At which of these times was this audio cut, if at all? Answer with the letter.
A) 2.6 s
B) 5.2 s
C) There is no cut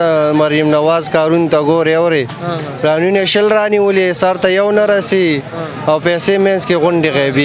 C